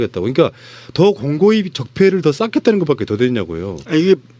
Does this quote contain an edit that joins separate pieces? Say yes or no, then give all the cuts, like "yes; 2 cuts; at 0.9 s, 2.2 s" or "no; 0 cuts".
no; 0 cuts